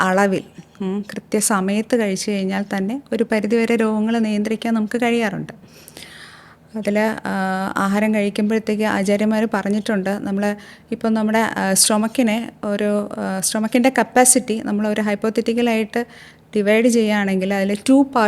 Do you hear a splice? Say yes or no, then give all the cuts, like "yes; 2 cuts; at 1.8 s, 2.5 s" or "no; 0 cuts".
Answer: no; 0 cuts